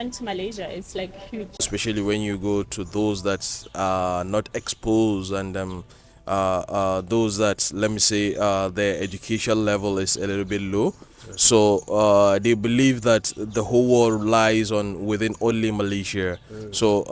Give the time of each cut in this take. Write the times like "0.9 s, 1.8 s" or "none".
1.7 s